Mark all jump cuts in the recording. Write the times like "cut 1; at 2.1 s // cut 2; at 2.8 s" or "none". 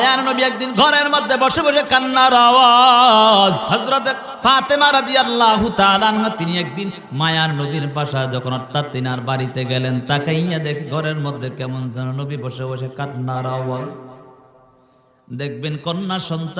cut 1; at 3.6 s